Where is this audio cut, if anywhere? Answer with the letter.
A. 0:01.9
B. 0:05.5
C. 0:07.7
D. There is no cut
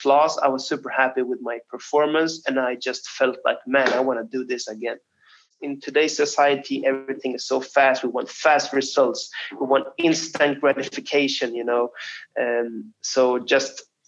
B